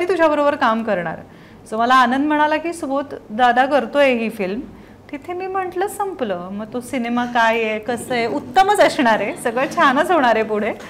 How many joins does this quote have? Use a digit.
0